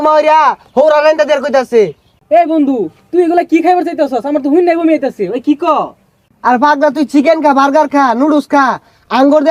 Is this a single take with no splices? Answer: yes; 0 cuts

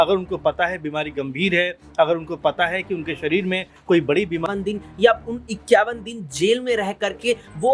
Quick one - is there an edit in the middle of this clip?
yes; 1 cut; at 4.4 s

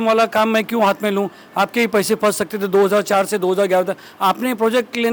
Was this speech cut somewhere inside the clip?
no; 0 cuts

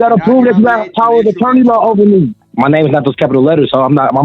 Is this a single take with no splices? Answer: no; 1 cut; at 2.4 s

